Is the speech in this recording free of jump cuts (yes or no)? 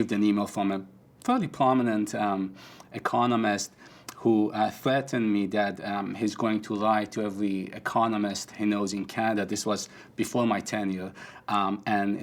yes